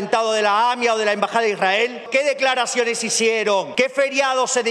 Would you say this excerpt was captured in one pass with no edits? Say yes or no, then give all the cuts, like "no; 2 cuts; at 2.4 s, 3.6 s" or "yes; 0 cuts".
no; 2 cuts; at 2.1 s, 3.7 s